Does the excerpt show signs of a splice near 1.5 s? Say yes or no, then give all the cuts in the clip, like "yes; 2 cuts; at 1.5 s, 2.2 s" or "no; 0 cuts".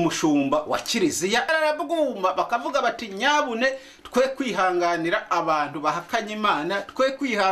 yes; 1 cut; at 1.5 s